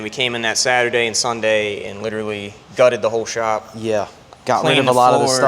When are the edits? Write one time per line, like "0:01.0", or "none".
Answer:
0:04.2